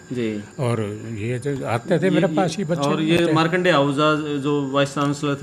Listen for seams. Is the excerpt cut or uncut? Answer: uncut